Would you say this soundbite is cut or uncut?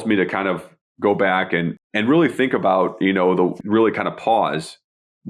cut